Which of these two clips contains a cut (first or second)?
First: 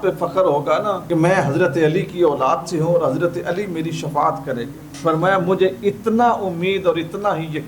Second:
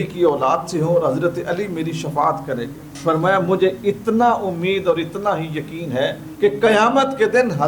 first